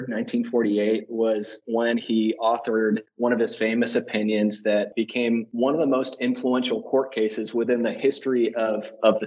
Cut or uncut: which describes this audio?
cut